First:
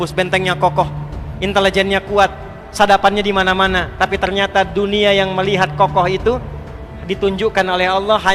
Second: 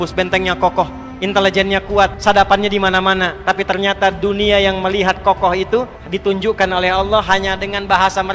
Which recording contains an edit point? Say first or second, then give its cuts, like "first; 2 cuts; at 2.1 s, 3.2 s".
second; 3 cuts; at 1.1 s, 2.2 s, 6.0 s